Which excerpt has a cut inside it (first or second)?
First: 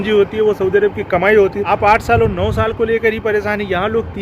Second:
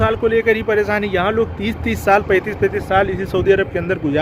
first